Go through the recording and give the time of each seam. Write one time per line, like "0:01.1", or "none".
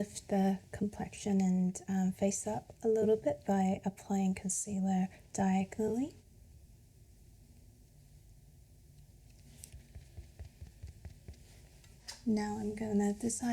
0:06.2
0:09.7
0:12.0